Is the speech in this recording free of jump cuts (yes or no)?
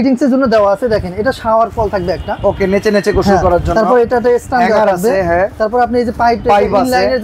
yes